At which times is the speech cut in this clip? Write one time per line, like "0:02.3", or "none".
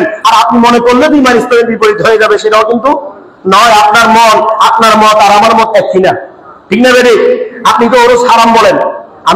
none